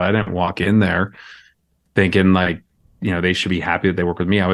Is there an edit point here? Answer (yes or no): no